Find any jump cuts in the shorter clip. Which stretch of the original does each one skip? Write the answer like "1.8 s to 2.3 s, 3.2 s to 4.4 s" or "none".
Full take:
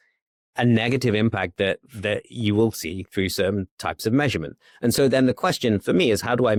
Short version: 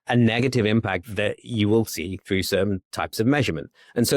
1.5 s to 1.9 s

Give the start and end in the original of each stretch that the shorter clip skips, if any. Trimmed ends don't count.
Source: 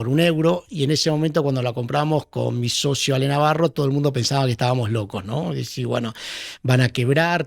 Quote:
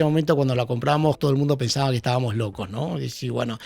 2.3 s to 3.7 s

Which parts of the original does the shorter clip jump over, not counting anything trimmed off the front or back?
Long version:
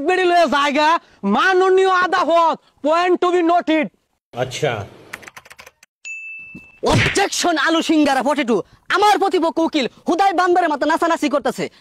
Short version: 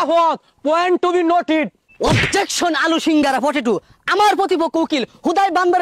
4.0 s to 6.7 s

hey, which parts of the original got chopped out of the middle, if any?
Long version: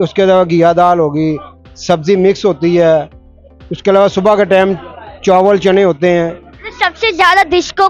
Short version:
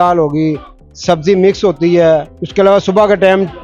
3.2 s to 3.7 s

